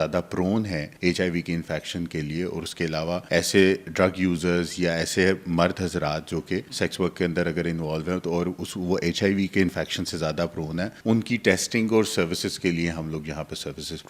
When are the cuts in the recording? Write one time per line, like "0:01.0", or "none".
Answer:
0:00.9
0:03.2
0:06.7
0:11.0